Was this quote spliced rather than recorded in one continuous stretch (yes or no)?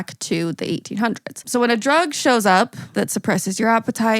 yes